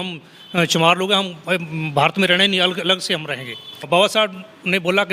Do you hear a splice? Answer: yes; 1 cut; at 3.8 s

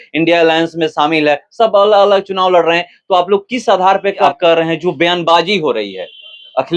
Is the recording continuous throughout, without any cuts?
no; 1 cut; at 4.2 s

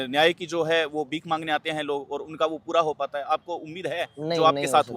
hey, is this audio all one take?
yes; 0 cuts

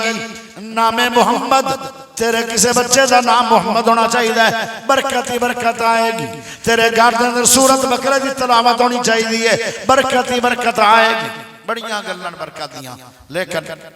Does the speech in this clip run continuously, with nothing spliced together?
yes; 0 cuts

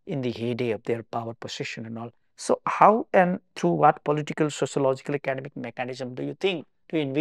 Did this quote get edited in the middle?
no; 0 cuts

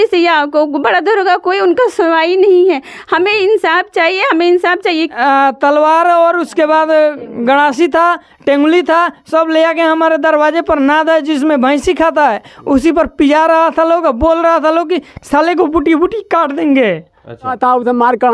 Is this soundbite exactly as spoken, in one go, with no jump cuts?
no; 2 cuts; at 5.1 s, 17.5 s

